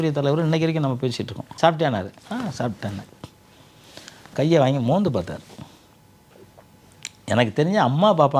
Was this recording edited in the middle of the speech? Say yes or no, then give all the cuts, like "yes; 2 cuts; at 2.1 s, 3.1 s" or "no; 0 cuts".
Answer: yes; 1 cut; at 1.5 s